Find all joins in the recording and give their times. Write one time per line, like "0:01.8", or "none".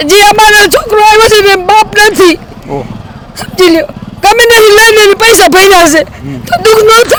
none